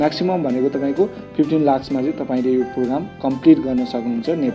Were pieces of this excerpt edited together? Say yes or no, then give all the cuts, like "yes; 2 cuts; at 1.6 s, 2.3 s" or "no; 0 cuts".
no; 0 cuts